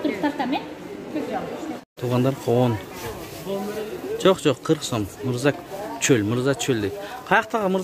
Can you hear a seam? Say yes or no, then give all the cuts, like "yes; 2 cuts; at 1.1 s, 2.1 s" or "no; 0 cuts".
yes; 1 cut; at 1.8 s